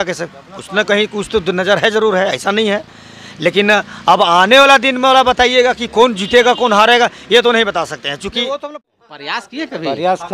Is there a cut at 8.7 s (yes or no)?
yes